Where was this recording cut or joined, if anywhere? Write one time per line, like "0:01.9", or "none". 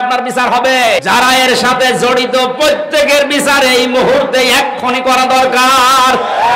0:01.0